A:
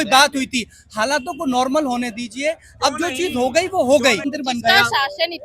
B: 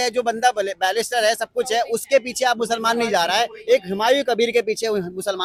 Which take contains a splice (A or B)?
A